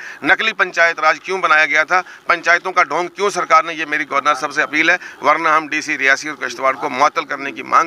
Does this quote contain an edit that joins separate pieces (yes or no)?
no